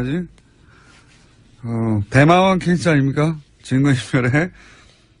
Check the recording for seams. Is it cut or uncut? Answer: uncut